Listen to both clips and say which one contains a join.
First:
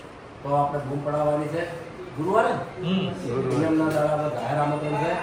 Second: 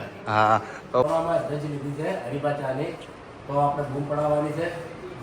second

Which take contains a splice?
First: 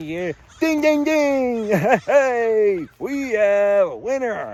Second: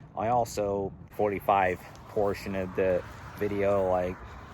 second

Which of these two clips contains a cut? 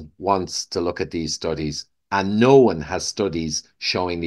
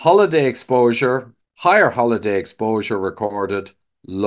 second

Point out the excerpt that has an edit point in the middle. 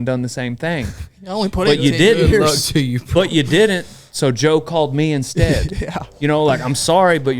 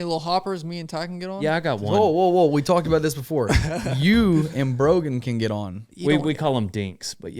second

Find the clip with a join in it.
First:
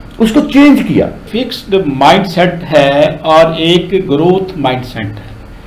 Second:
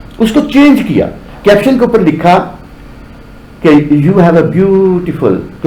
first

